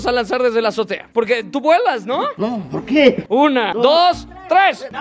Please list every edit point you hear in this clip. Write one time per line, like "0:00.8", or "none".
0:01.0
0:03.2